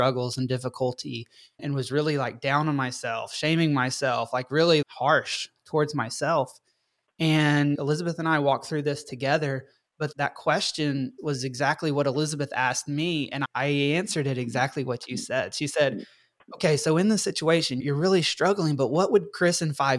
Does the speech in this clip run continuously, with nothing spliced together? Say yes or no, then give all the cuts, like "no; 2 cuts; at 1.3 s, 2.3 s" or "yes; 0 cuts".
no; 3 cuts; at 4.8 s, 10.1 s, 13.4 s